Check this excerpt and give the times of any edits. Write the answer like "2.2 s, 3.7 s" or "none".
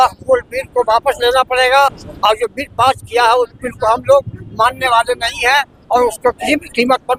none